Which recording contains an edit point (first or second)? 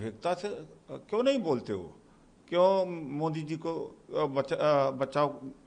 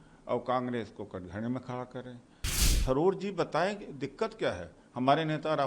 second